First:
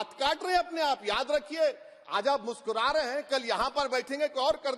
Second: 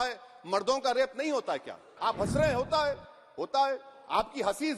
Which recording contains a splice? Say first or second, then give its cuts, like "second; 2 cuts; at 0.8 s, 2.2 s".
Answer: second; 1 cut; at 1.9 s